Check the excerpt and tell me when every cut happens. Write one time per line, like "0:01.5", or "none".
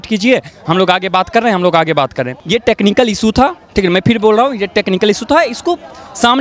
0:02.3